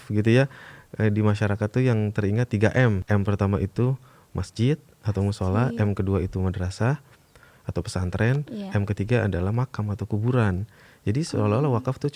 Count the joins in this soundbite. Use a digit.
1